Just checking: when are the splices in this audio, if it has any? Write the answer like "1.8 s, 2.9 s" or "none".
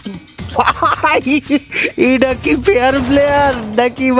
none